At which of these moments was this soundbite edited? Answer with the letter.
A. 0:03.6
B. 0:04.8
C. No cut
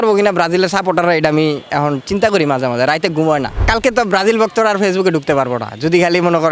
A